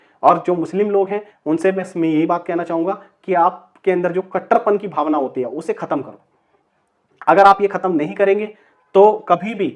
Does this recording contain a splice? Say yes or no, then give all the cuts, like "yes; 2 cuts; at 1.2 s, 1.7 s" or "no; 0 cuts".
no; 0 cuts